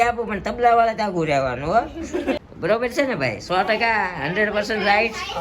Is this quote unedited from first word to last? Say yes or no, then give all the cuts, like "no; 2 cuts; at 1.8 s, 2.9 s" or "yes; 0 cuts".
no; 1 cut; at 2.4 s